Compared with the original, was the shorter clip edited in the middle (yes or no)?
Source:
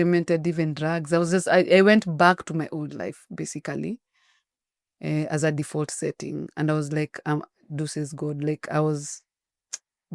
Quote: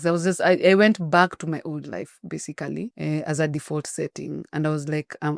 yes